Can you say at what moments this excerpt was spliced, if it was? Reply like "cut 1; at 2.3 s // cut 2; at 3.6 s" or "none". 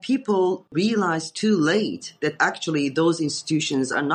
none